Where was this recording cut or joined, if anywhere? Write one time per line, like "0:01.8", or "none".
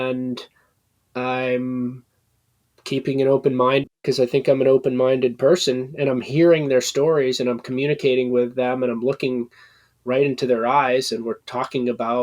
0:03.9